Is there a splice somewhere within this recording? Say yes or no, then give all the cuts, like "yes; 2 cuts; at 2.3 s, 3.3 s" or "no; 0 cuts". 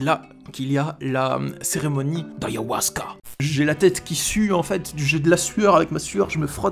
yes; 1 cut; at 3.1 s